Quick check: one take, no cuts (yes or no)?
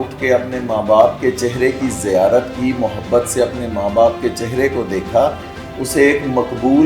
yes